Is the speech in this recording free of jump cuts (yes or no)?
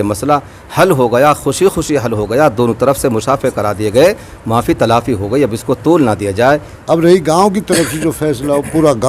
no